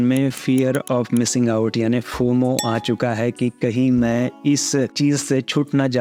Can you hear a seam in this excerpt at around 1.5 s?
no; 0 cuts

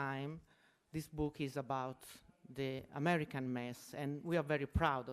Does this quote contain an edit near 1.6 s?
yes; 1 cut; at 1.6 s

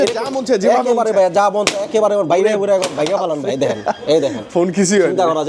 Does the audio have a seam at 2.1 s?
no; 0 cuts

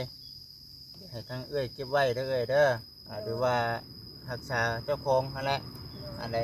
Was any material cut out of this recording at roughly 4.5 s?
no; 0 cuts

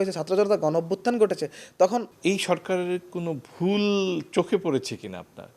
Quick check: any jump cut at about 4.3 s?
no; 1 cut; at 2.1 s

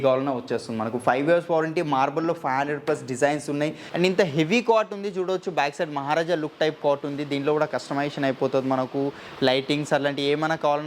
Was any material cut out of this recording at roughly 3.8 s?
yes; 1 cut; at 3.8 s

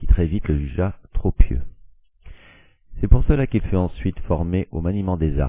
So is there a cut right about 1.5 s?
no; 1 cut; at 3.4 s

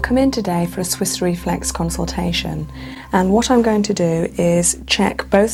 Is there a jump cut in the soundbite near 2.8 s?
no; 0 cuts

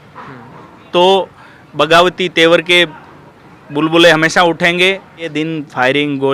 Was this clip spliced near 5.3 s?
yes; 1 cut; at 5.3 s

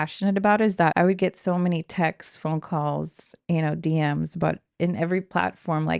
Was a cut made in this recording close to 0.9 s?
yes; 1 cut; at 0.9 s

